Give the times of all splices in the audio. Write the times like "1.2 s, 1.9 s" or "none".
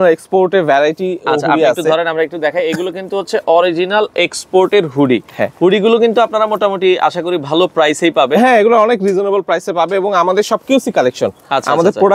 none

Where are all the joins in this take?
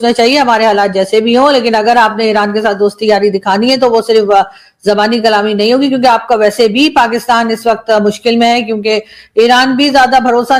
none

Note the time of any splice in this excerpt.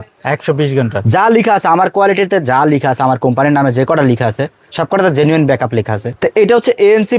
6.1 s

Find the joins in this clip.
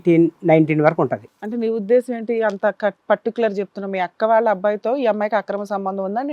1.2 s

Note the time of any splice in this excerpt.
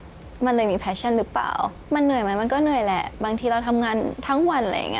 1.8 s

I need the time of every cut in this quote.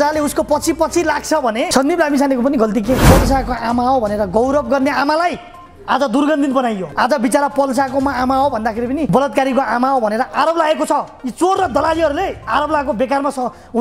1.7 s, 3.0 s, 6.9 s, 9.1 s

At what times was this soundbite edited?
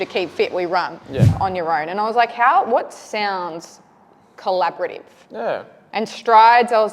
1.3 s

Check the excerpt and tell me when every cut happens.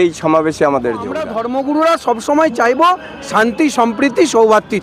1.5 s

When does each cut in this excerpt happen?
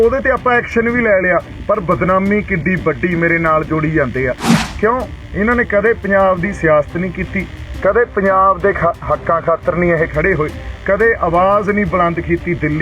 4.5 s

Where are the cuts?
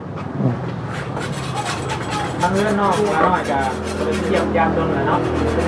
none

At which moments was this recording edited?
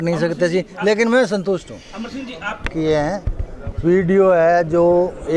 2.6 s

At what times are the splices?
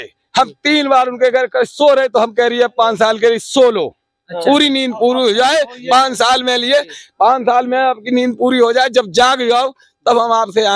none

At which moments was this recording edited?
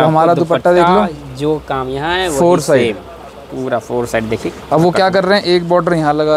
none

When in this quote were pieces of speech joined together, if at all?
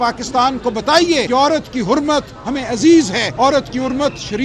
1.3 s, 3.2 s

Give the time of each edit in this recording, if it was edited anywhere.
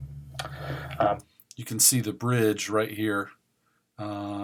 none

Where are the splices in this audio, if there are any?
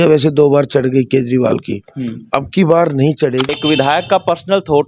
3.5 s

